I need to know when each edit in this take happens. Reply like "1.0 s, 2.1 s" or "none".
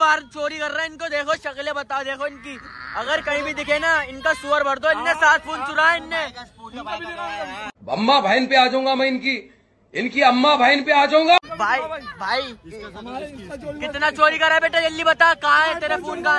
none